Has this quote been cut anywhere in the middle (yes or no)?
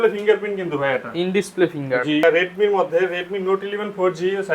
yes